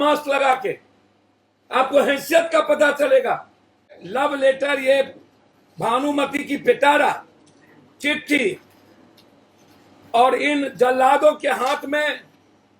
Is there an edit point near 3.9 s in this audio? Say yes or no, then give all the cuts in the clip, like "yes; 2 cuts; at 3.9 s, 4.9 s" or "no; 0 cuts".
yes; 1 cut; at 3.9 s